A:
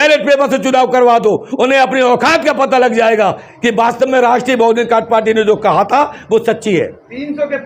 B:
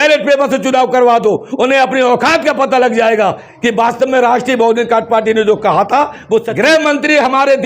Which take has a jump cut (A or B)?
B